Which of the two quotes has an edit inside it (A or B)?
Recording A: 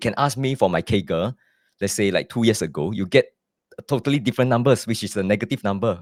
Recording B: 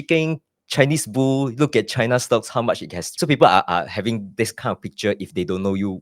B